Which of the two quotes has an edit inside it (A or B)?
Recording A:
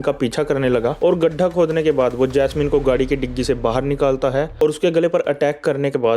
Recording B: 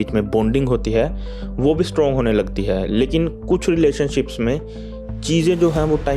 A